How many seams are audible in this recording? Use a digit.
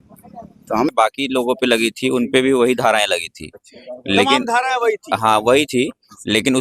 1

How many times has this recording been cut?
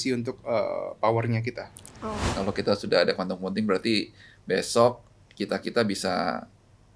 1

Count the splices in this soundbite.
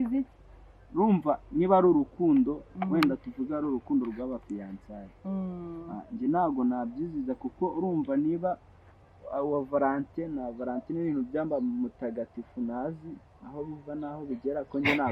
0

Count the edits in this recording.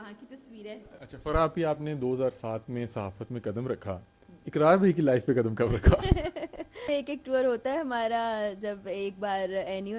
2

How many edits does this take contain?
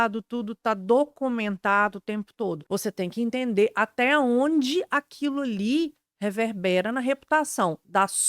1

